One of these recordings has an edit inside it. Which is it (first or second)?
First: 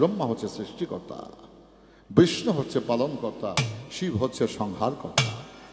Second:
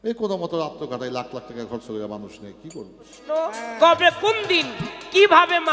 second